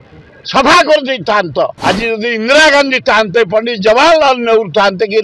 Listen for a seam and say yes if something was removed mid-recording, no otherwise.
yes